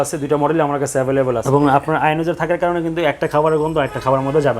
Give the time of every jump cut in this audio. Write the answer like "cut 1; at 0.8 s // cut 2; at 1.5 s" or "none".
cut 1; at 1.4 s